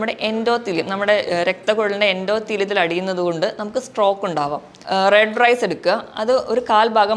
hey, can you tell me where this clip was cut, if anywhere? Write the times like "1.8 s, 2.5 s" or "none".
4.7 s